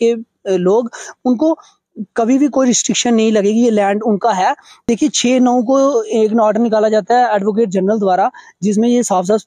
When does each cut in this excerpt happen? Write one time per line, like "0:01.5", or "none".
0:04.8